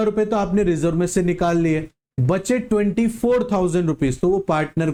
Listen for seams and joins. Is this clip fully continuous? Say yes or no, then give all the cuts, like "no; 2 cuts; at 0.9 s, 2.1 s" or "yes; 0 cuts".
yes; 0 cuts